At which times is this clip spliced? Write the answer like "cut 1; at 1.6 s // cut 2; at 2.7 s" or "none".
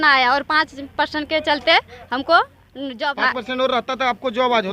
cut 1; at 3.1 s

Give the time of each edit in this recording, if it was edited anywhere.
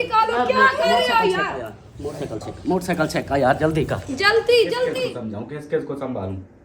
cut 1; at 4.9 s

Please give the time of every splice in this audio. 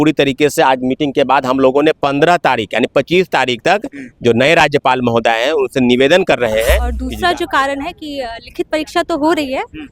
cut 1; at 7.0 s

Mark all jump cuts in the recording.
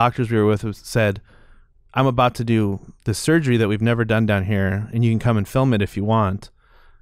none

